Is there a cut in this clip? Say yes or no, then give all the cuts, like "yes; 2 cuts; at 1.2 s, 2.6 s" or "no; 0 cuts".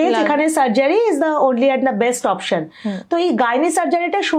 no; 0 cuts